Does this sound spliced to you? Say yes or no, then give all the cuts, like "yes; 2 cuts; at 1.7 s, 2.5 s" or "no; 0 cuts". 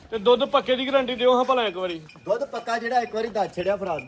no; 0 cuts